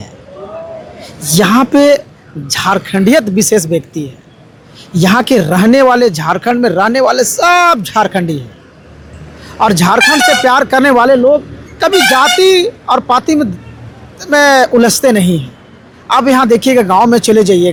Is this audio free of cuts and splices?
yes; 0 cuts

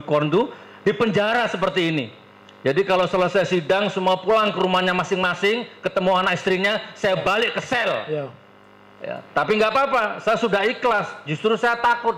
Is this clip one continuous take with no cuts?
yes; 0 cuts

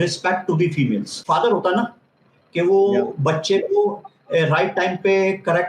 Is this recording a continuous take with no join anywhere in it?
no; 1 cut; at 1.2 s

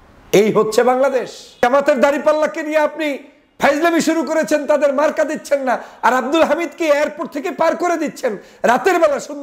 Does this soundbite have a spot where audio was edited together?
yes; 1 cut; at 1.6 s

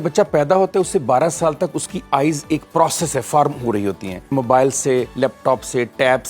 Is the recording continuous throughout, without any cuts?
no; 1 cut; at 4.3 s

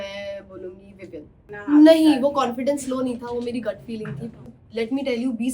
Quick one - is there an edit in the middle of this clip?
yes; 2 cuts; at 1.5 s, 4.5 s

